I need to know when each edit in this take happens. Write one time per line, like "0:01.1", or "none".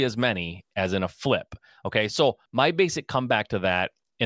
0:02.4